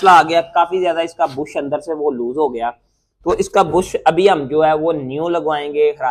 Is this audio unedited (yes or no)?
yes